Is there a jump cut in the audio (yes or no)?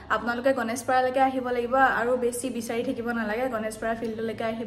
no